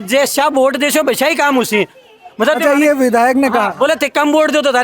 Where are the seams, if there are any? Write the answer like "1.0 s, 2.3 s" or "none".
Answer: none